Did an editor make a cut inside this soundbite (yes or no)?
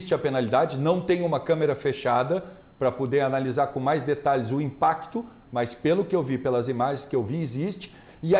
no